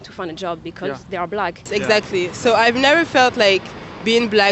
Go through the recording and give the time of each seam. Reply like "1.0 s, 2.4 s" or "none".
1.7 s